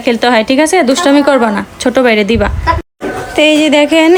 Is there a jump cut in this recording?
no; 0 cuts

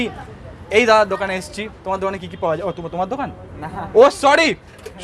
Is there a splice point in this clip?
no; 0 cuts

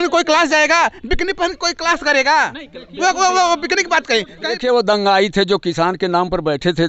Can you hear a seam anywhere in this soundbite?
yes; 1 cut; at 4.5 s

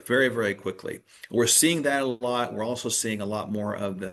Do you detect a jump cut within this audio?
no; 0 cuts

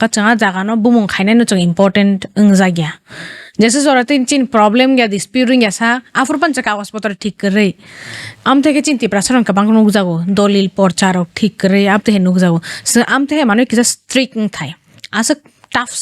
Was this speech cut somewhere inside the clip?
no; 0 cuts

